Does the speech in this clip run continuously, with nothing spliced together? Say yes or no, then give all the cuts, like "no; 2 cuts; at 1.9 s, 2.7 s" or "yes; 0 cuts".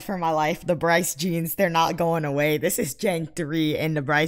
yes; 0 cuts